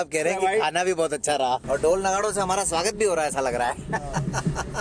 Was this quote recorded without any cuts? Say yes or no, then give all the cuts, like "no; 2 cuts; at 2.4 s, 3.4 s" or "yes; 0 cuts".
no; 1 cut; at 1.6 s